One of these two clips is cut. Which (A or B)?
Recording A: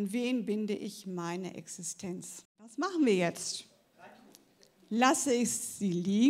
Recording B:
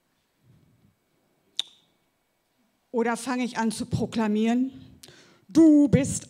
A